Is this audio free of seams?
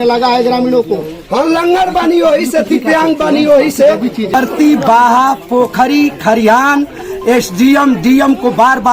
no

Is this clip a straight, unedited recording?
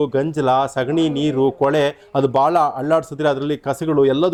yes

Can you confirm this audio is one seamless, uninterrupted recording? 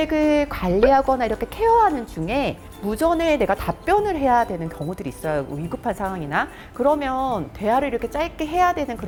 yes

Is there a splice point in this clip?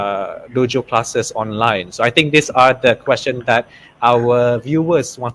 no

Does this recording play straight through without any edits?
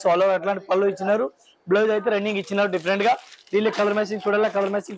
yes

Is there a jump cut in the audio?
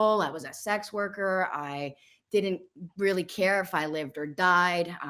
no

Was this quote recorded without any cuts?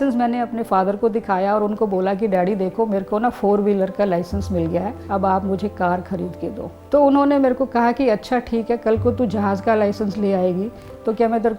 no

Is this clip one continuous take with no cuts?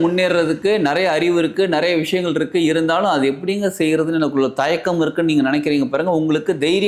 yes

